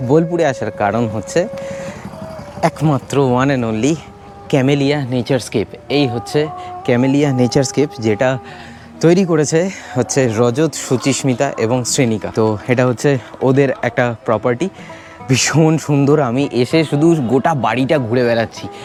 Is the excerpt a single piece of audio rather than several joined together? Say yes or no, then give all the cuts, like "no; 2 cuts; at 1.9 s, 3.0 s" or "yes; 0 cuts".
yes; 0 cuts